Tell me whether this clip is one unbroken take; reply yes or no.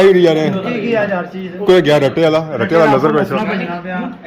yes